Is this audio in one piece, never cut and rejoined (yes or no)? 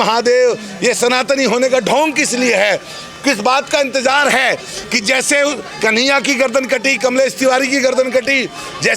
yes